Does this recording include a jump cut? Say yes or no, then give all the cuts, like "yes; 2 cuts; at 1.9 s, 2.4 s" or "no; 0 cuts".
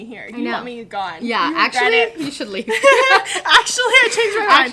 no; 0 cuts